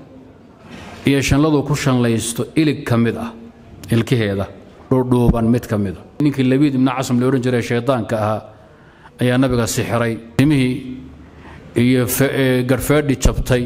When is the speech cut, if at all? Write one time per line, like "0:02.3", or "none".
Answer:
0:06.2
0:10.2